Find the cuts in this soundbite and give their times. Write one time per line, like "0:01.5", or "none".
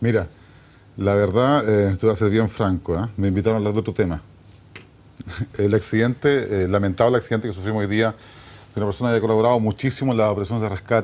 none